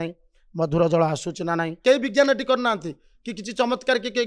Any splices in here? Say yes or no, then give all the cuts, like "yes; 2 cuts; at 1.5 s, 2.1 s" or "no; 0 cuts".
yes; 1 cut; at 1.8 s